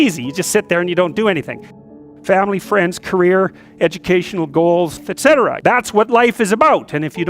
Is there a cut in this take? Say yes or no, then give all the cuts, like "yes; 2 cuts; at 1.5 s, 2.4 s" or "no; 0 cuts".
yes; 2 cuts; at 1.7 s, 5.3 s